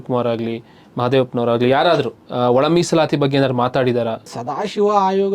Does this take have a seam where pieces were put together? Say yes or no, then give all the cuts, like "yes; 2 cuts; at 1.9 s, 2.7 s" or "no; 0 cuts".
yes; 2 cuts; at 2.2 s, 4.3 s